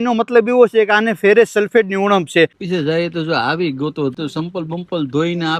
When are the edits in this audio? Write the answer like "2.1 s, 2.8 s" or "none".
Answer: 2.6 s, 4.1 s